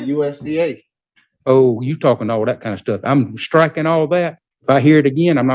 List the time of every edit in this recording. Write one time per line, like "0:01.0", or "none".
0:04.5